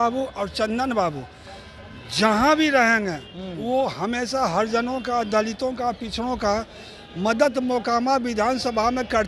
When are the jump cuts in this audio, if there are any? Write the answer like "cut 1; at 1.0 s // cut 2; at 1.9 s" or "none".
none